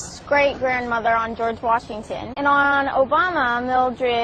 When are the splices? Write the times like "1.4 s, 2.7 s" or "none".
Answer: 2.2 s